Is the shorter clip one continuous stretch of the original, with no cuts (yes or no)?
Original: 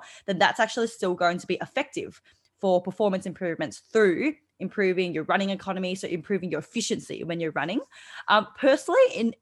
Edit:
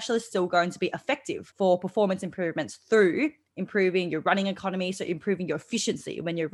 no